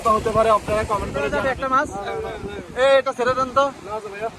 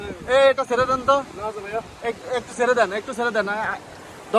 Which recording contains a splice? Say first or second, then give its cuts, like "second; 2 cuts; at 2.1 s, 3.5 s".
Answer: first; 1 cut; at 1.3 s